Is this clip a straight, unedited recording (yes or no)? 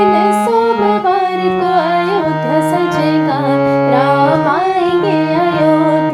yes